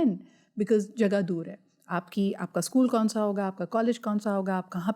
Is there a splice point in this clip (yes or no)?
no